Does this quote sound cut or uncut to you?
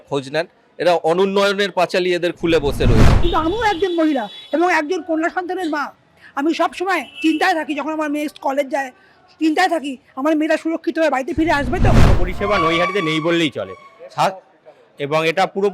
cut